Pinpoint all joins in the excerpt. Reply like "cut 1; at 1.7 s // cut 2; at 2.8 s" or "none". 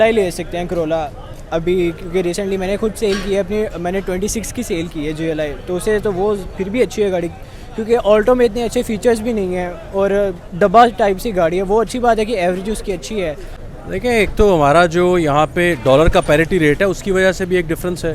cut 1; at 13.8 s